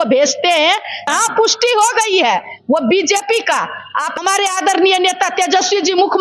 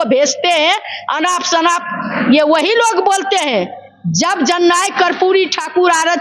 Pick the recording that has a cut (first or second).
first